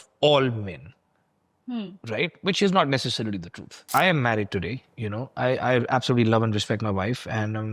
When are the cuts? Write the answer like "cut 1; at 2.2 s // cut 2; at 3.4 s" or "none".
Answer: cut 1; at 3.9 s